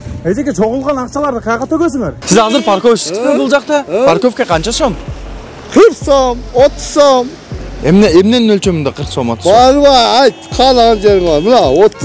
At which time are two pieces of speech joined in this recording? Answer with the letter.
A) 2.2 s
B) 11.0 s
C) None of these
A